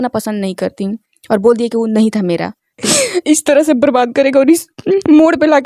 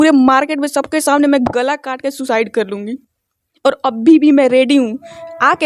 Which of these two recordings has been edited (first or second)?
first